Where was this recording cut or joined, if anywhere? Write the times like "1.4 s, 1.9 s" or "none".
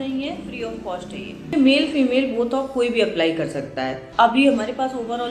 1.5 s, 4.0 s